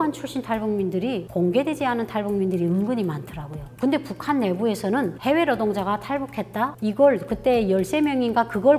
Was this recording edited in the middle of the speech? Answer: no; 0 cuts

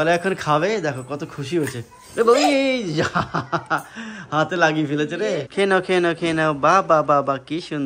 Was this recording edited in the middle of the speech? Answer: yes; 1 cut; at 5.5 s

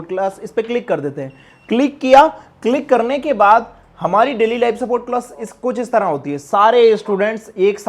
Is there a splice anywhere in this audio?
no; 0 cuts

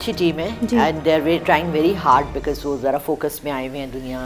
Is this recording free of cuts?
yes; 0 cuts

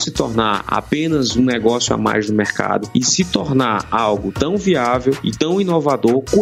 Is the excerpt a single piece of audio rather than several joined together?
yes; 0 cuts

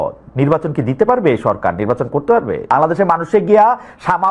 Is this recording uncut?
no; 1 cut; at 2.7 s

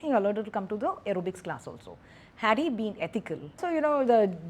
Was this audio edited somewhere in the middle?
yes; 1 cut; at 3.6 s

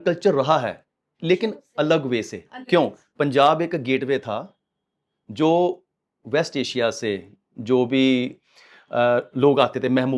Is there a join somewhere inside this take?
no; 0 cuts

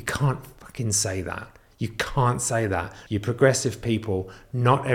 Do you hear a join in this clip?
yes; 1 cut; at 3.0 s

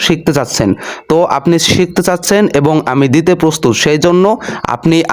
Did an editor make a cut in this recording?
no; 0 cuts

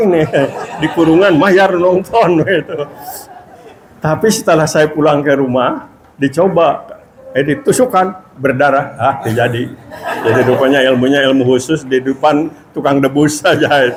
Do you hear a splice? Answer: no; 0 cuts

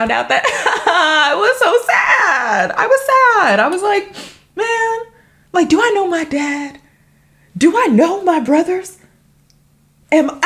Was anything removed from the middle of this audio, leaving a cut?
no; 0 cuts

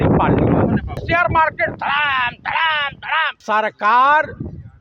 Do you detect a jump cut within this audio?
yes; 2 cuts; at 1.0 s, 3.4 s

